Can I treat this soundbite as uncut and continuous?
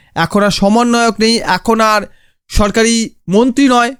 yes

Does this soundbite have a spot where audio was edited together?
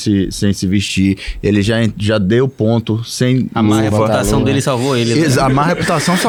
no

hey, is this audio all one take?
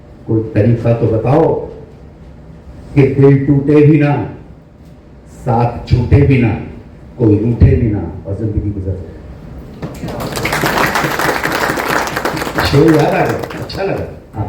yes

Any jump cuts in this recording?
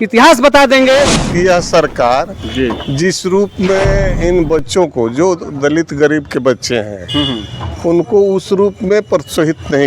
yes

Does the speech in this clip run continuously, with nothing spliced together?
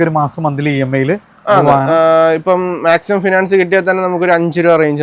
yes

